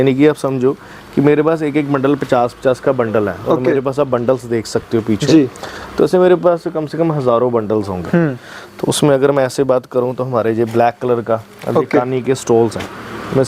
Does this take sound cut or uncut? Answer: uncut